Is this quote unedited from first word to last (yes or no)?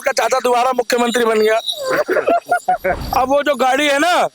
no